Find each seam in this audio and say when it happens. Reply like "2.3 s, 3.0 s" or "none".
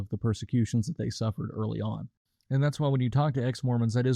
2.1 s